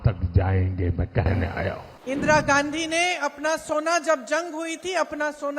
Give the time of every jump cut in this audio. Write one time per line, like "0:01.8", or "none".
0:01.9